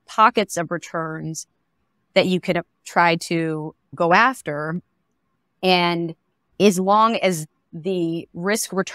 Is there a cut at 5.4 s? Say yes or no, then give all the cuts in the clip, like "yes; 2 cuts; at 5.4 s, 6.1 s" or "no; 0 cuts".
no; 2 cuts; at 3.9 s, 7.7 s